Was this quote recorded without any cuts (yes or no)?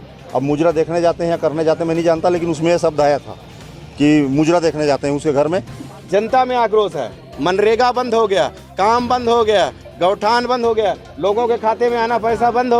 no